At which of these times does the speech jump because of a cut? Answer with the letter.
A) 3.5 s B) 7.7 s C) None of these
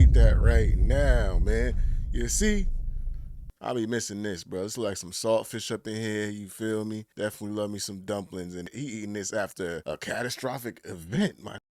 A